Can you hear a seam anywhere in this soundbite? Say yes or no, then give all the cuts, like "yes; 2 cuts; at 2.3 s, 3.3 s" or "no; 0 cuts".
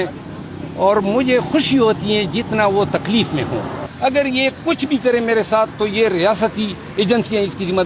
yes; 1 cut; at 3.8 s